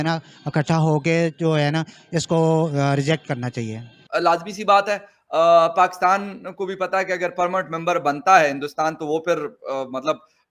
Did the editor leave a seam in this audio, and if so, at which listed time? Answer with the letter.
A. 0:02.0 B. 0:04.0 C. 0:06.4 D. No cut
B